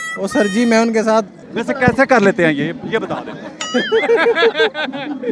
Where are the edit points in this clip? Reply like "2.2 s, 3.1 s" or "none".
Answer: 1.4 s